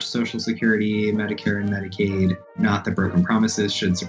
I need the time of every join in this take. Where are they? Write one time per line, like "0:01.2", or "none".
0:02.6